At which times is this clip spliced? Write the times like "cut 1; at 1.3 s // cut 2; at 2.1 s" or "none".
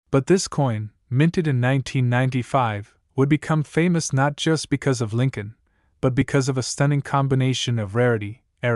cut 1; at 7.9 s